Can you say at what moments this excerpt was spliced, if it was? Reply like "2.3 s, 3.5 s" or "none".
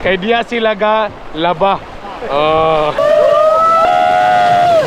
2.9 s